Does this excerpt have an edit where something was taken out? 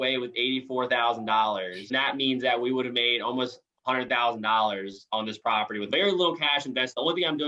yes; 2 cuts; at 1.8 s, 5.8 s

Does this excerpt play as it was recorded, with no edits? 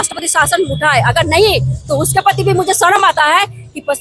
yes; 0 cuts

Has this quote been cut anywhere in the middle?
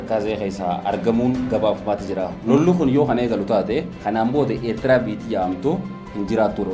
yes; 1 cut; at 2.3 s

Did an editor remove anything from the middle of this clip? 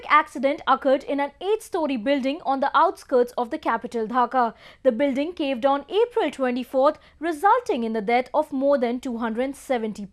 yes; 1 cut; at 7.1 s

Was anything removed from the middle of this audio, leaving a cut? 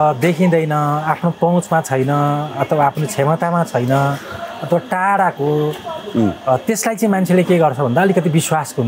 no; 0 cuts

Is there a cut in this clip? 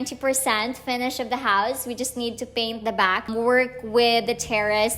yes; 1 cut; at 3.3 s

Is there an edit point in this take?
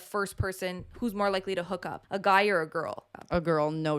yes; 2 cuts; at 2.0 s, 3.0 s

